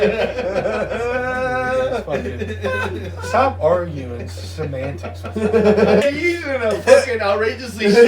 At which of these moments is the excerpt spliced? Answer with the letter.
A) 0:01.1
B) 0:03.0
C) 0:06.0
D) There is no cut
C